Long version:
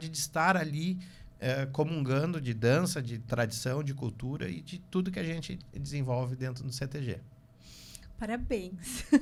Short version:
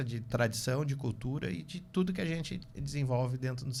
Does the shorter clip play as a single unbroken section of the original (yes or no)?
yes